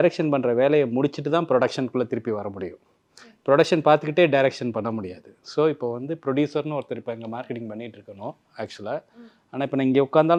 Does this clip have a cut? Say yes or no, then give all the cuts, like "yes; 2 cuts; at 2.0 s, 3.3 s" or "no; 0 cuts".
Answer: no; 0 cuts